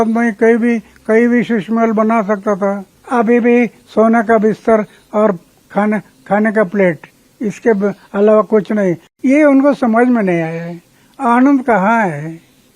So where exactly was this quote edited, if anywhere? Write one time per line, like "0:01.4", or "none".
0:02.9
0:09.1